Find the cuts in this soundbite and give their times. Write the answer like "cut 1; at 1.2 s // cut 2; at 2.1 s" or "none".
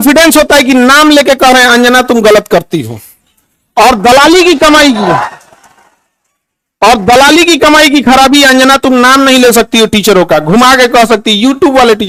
none